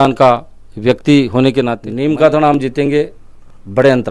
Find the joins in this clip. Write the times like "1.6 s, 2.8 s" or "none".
1.8 s